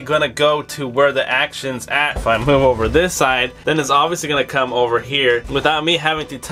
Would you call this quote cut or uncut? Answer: cut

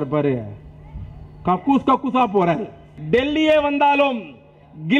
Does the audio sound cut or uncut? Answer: cut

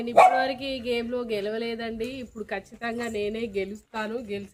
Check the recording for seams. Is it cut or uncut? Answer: uncut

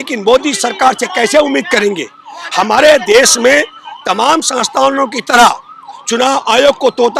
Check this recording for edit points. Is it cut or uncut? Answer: uncut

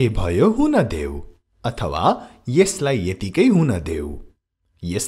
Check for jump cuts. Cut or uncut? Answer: uncut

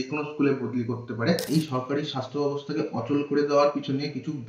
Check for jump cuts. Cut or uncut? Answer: cut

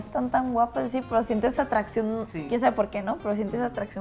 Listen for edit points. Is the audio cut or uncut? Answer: uncut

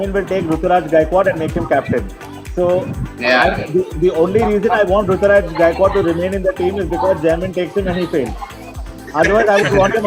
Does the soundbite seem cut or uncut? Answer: uncut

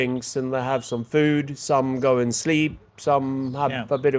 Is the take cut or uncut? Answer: uncut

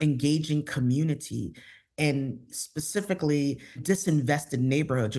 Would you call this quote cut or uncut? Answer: cut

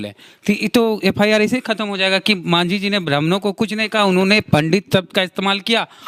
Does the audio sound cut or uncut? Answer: uncut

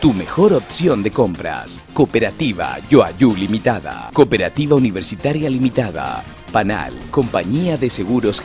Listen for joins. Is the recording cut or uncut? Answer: uncut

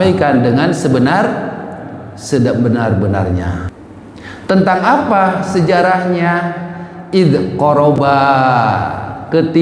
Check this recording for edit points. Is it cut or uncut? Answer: cut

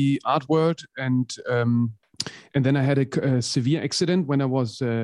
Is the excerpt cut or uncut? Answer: uncut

